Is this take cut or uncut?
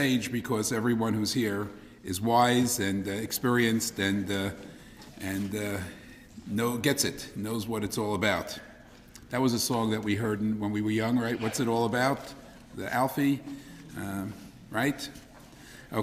cut